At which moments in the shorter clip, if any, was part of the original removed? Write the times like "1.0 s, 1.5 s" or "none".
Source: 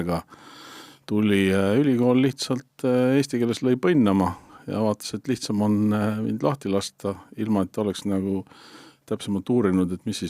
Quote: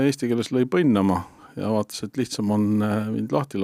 none